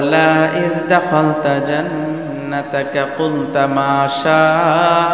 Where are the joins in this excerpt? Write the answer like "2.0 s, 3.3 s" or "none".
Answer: none